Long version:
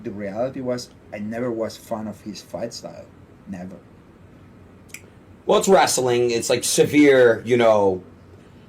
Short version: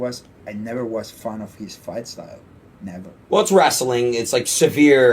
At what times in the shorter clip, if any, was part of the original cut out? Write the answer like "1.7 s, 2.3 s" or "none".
3.2 s